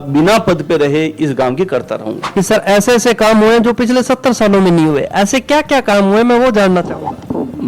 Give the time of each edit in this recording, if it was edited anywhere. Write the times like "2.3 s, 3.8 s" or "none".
2.2 s